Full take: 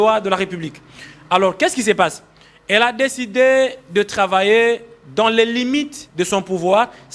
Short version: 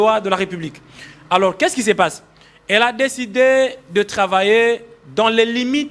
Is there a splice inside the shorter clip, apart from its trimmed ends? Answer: no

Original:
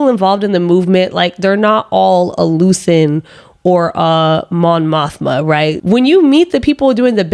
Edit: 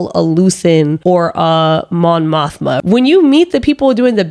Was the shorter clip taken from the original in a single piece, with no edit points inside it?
no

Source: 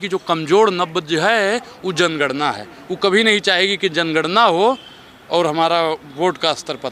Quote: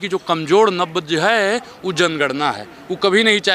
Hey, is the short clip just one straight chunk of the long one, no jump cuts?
yes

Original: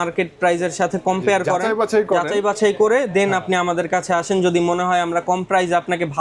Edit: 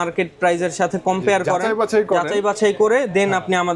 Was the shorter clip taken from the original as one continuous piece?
yes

